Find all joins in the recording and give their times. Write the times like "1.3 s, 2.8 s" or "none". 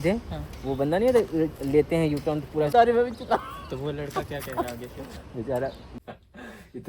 2.7 s, 5.9 s